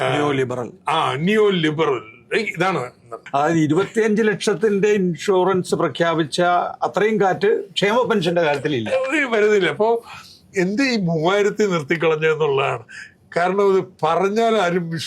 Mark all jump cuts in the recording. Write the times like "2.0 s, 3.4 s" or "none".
3.1 s